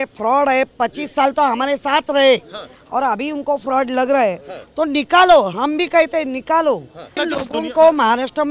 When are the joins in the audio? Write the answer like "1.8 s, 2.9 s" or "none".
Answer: 7.1 s